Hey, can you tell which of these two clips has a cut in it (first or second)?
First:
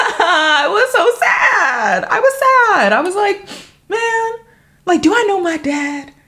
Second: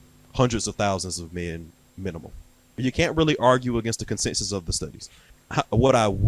second